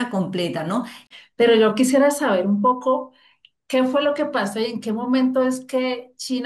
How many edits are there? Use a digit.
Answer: 1